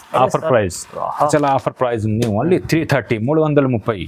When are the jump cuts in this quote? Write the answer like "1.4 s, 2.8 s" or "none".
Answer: 1.3 s